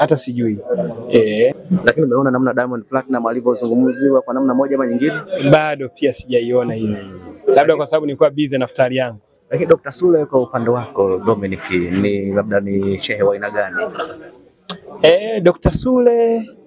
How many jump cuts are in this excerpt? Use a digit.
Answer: 1